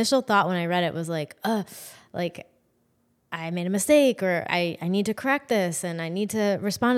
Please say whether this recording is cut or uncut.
cut